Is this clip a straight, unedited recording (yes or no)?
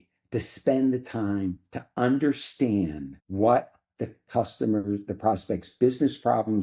yes